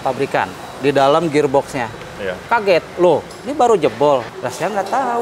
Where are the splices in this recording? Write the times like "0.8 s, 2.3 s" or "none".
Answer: none